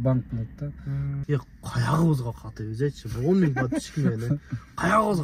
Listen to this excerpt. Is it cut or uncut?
cut